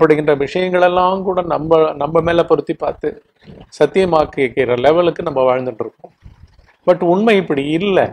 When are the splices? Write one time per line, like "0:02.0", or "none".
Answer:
none